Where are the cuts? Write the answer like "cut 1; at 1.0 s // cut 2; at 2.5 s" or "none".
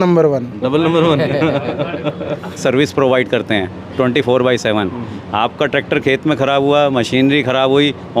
cut 1; at 2.6 s